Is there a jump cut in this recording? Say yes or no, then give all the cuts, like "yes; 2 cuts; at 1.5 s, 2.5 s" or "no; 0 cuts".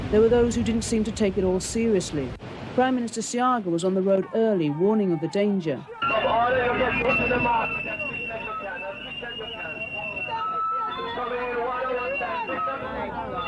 no; 0 cuts